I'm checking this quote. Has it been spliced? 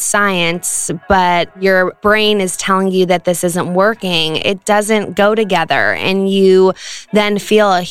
yes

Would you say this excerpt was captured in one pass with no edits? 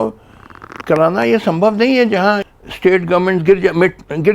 no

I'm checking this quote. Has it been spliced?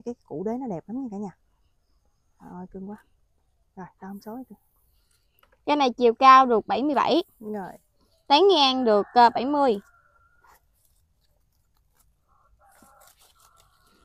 no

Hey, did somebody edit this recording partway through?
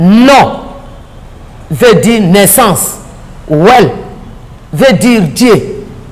no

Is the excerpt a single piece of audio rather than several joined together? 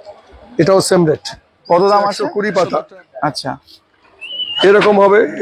no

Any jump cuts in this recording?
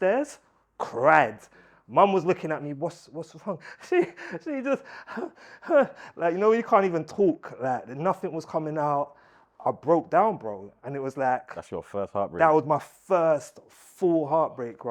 no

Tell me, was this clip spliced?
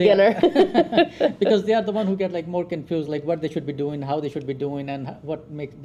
no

